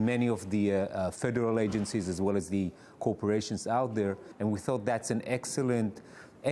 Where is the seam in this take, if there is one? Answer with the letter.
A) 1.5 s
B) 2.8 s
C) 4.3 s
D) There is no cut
C